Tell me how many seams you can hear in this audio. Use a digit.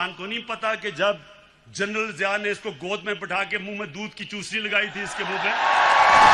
0